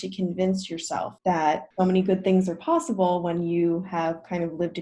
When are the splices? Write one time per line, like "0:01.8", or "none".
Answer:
0:01.1
0:01.7